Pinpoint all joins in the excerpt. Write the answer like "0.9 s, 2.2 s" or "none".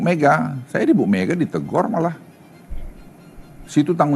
none